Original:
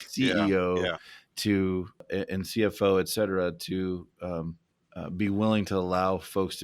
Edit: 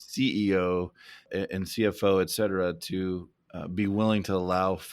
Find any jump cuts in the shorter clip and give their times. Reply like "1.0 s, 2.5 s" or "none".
1.2 s, 3.3 s